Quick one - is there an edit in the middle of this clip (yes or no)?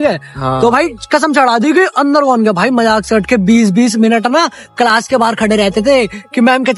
no